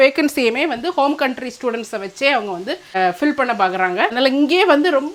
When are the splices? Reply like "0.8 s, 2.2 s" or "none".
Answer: 4.1 s